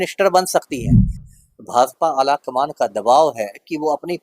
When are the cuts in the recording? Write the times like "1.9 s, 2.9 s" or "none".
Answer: 1.2 s